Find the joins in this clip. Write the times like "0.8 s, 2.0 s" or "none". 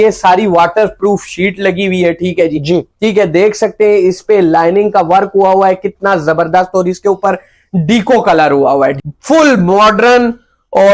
9.0 s